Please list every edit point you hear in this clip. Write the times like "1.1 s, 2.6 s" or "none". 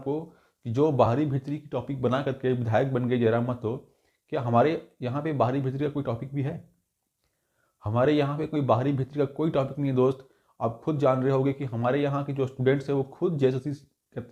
none